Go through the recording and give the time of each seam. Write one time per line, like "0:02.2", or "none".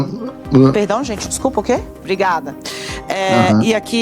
0:02.0